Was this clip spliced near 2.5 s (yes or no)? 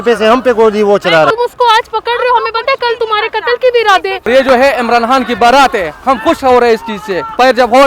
no